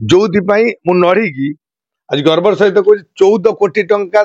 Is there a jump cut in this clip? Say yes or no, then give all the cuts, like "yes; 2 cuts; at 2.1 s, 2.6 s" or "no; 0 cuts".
no; 0 cuts